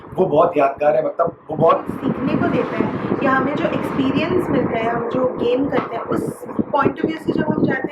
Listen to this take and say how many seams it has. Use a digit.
1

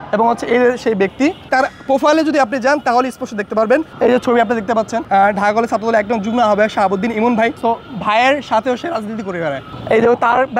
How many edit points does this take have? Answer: 5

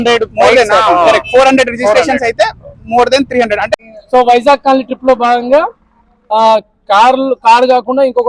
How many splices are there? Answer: 1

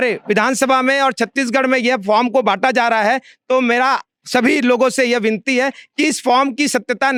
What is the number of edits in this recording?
0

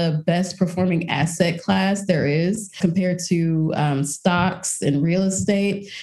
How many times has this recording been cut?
1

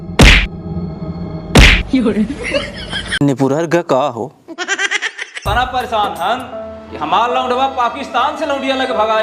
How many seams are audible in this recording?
2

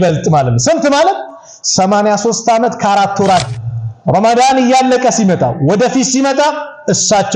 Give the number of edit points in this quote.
1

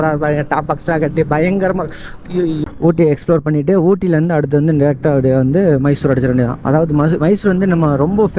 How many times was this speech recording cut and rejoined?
1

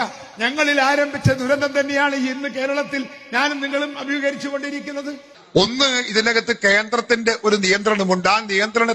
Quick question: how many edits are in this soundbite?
1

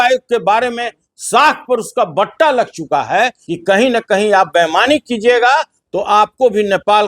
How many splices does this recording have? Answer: 1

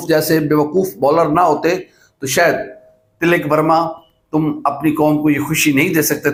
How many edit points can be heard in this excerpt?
0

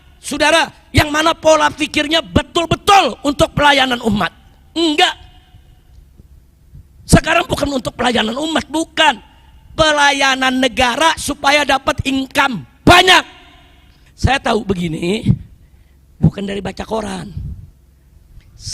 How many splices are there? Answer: 1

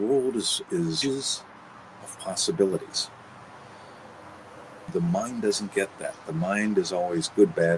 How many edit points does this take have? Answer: 2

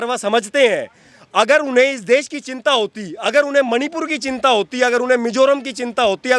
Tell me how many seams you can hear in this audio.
0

